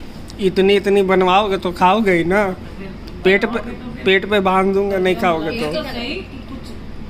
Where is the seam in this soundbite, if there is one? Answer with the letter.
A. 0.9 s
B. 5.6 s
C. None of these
C